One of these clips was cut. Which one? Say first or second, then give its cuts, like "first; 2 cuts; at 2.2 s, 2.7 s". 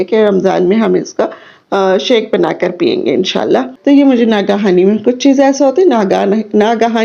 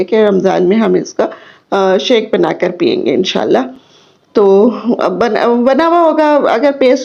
first; 1 cut; at 3.7 s